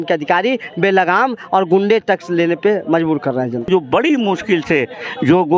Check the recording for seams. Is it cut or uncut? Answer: cut